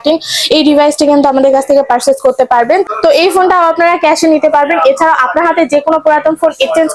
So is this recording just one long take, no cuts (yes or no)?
no